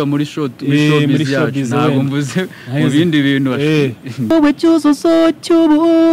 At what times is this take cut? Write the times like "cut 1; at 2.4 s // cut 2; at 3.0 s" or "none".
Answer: cut 1; at 4.3 s